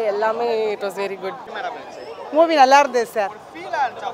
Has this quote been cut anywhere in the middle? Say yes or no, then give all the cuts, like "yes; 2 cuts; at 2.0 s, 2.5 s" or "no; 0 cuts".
no; 0 cuts